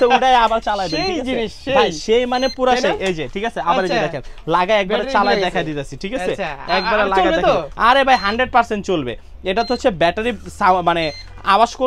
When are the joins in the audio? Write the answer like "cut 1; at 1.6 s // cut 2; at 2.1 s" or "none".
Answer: none